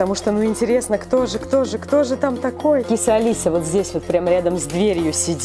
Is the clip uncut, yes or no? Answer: no